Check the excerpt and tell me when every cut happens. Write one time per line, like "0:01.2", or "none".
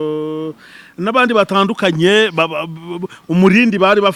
none

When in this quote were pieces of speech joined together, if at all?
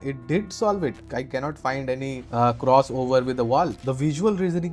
0:01.0
0:02.2
0:03.8

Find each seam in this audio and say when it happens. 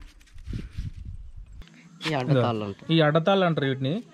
0:01.7

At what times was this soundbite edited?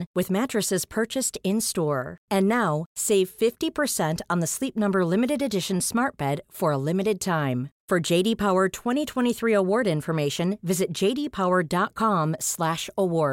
none

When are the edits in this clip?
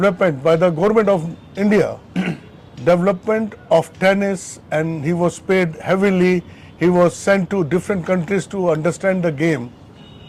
none

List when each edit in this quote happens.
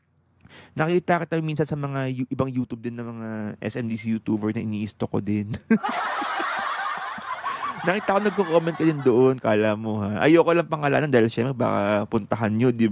none

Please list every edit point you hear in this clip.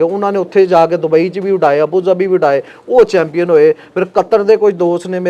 none

